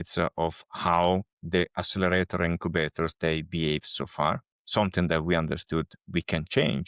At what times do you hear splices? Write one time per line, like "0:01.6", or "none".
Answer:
0:01.3
0:04.5